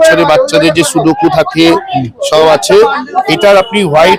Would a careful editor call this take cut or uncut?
uncut